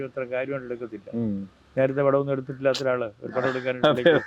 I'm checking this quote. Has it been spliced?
no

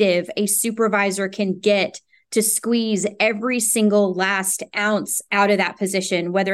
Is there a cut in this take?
yes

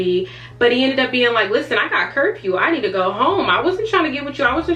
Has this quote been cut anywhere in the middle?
no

